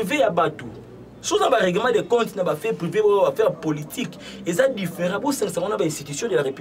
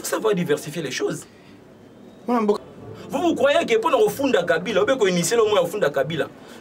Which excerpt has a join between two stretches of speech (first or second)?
second